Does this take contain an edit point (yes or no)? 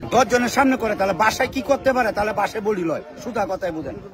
no